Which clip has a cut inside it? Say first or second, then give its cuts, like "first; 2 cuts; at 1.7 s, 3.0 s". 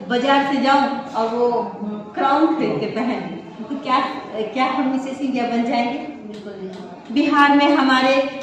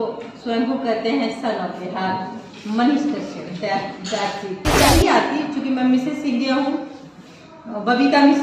second; 1 cut; at 4.9 s